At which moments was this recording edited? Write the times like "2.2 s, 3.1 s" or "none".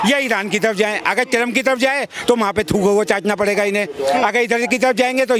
none